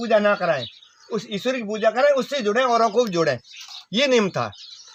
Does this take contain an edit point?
no; 0 cuts

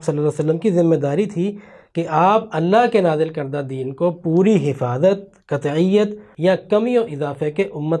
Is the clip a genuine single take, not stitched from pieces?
no; 1 cut; at 6.2 s

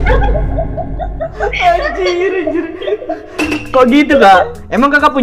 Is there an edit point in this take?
no; 0 cuts

